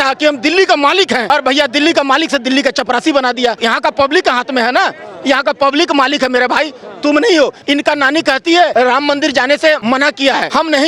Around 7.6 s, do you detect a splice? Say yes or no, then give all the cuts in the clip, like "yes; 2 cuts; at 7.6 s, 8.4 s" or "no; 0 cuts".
yes; 5 cuts; at 1.2 s, 3.6 s, 7.6 s, 8.7 s, 10.1 s